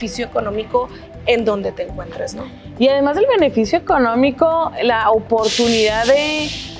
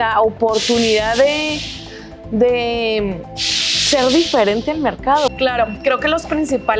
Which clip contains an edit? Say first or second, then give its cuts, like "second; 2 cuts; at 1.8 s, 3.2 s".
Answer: second; 1 cut; at 5.3 s